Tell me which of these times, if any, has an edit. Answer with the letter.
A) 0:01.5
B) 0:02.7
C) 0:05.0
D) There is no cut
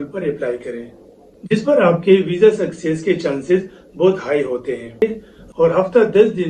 C